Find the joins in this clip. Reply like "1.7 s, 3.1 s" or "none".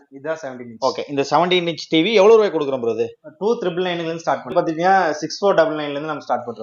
4.5 s

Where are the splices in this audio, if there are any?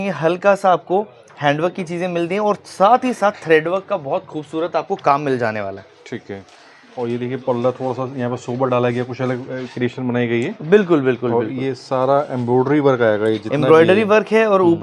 none

